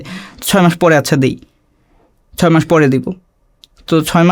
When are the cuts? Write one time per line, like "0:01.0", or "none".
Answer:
none